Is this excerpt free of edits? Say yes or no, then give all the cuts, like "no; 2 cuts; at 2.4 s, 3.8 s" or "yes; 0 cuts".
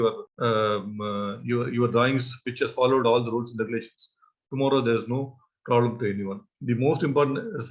no; 1 cut; at 6.5 s